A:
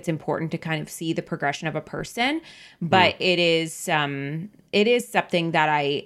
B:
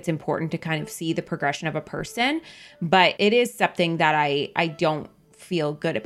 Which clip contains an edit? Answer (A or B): B